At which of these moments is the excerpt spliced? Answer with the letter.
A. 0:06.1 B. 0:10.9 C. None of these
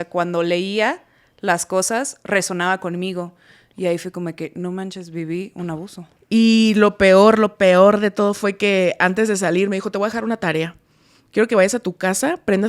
A